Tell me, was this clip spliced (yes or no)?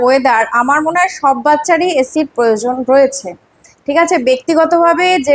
no